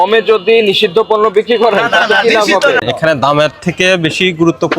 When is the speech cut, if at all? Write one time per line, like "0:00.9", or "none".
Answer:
0:02.8